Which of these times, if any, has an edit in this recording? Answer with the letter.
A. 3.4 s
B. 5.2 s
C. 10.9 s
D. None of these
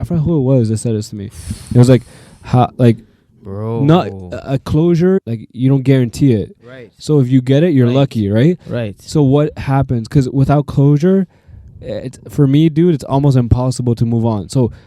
B